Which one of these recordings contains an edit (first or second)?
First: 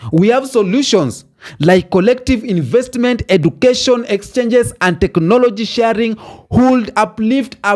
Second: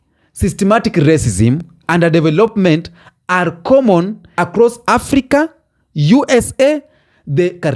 second